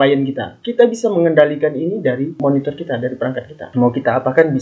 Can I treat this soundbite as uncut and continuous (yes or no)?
yes